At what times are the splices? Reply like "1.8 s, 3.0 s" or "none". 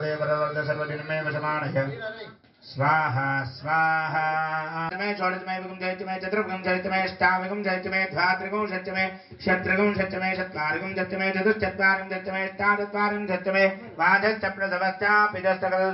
4.9 s